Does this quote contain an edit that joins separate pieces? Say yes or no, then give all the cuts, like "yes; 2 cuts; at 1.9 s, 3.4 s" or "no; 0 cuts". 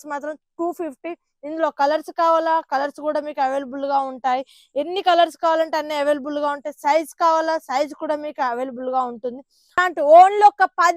yes; 1 cut; at 9.8 s